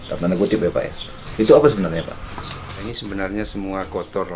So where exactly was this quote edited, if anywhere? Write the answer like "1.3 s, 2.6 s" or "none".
2.9 s